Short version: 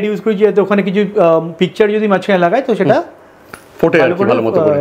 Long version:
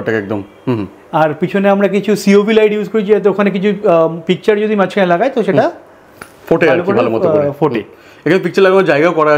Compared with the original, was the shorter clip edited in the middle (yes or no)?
no